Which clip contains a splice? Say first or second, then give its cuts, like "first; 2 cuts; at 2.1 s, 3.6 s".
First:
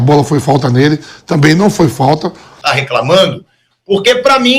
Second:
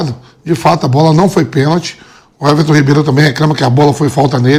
first; 1 cut; at 2.6 s